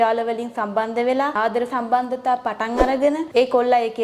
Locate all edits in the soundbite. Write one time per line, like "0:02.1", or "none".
0:01.3
0:03.2